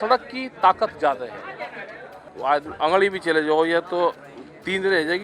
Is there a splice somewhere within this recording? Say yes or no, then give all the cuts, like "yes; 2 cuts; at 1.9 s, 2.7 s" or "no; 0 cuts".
yes; 1 cut; at 2.2 s